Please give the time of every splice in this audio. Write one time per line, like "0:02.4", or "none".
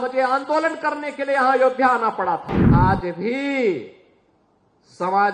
0:02.6